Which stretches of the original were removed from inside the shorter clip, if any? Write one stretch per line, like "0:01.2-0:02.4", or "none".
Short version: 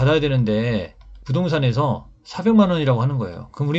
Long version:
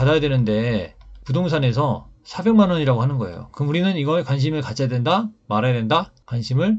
none